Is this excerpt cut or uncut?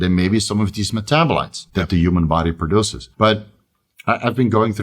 cut